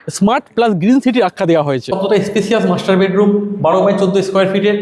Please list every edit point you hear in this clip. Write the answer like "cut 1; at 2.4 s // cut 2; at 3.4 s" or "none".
cut 1; at 1.9 s